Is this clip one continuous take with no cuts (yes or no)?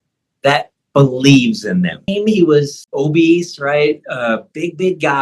no